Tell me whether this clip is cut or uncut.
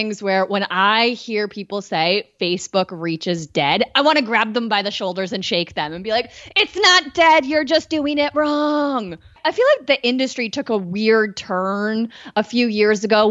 cut